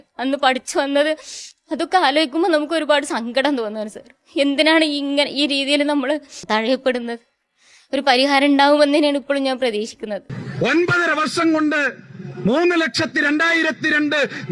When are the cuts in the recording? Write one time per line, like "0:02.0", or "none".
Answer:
0:10.3